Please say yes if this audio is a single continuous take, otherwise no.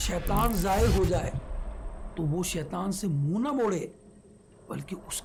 yes